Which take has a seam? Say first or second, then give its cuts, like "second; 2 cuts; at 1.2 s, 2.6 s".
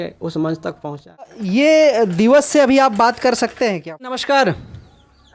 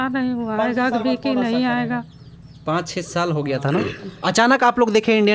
first; 2 cuts; at 1.4 s, 4.1 s